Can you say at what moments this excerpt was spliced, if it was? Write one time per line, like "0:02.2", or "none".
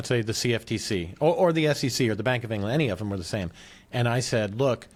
none